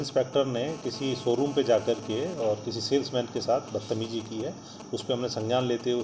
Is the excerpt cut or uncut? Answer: uncut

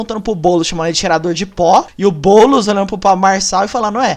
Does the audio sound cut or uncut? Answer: cut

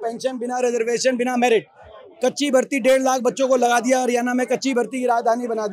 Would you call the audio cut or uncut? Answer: uncut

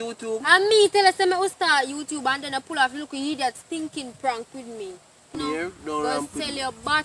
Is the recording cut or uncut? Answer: cut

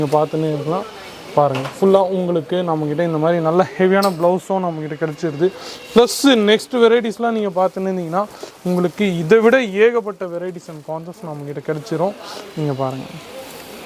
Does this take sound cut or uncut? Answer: uncut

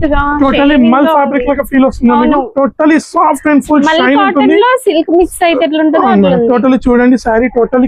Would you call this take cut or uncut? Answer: uncut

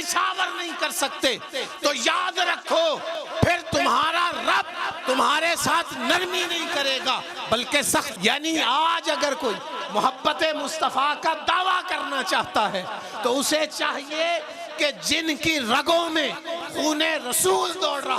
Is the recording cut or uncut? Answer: cut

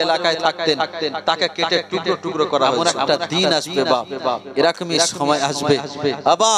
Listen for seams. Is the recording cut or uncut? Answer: cut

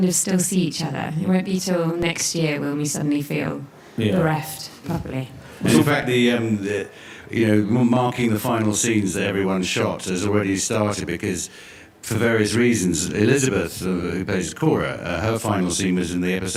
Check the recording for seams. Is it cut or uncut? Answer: uncut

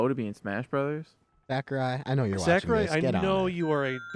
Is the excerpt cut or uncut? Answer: uncut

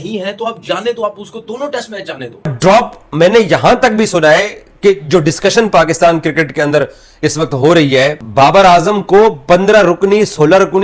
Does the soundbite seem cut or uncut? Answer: cut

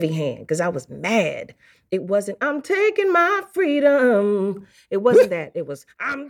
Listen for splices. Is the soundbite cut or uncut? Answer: uncut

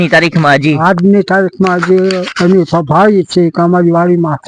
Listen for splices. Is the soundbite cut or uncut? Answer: uncut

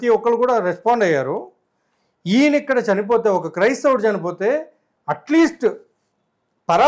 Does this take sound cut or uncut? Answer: uncut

